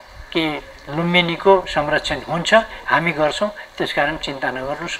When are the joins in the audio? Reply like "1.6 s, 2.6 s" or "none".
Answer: none